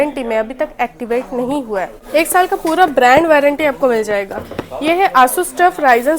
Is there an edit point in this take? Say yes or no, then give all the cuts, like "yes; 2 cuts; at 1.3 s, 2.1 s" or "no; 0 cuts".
yes; 1 cut; at 2.0 s